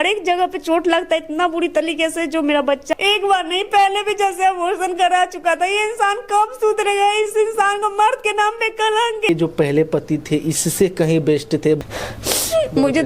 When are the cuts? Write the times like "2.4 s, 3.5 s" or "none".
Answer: 3.0 s, 9.3 s, 11.8 s